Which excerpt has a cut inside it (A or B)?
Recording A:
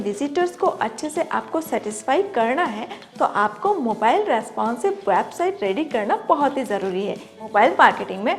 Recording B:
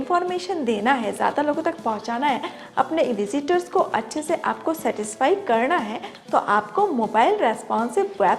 A